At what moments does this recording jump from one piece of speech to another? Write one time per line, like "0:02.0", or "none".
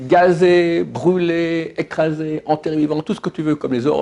none